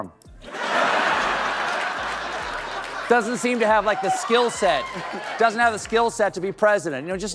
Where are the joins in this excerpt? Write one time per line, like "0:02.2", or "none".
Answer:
none